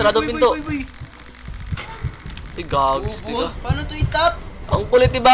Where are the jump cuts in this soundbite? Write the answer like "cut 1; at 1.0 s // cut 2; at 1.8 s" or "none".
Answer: cut 1; at 3.6 s